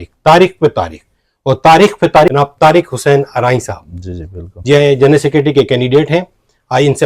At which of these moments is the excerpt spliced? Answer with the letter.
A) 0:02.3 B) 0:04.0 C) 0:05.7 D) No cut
A